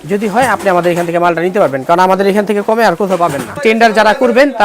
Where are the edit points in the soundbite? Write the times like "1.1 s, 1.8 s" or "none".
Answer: 3.6 s